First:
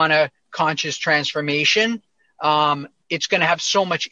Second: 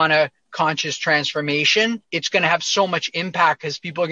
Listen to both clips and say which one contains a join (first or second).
second